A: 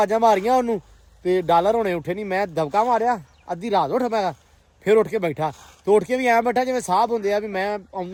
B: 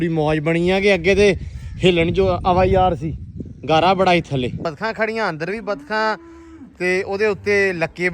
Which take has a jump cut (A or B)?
B